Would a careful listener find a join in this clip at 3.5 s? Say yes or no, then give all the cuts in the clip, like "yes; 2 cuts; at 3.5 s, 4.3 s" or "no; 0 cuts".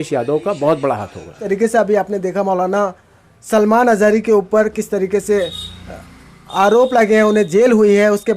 no; 1 cut; at 1.4 s